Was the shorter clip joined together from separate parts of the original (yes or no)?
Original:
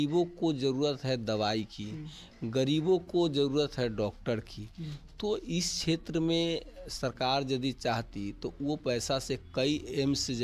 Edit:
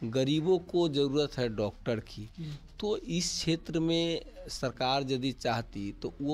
no